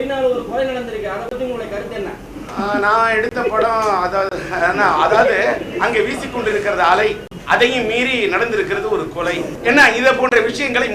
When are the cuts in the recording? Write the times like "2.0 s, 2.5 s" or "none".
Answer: 2.3 s, 7.3 s, 9.5 s